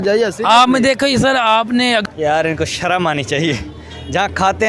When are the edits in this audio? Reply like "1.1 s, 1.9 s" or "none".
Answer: 2.0 s